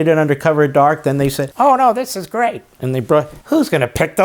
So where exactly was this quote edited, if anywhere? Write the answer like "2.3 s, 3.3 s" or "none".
1.4 s, 3.4 s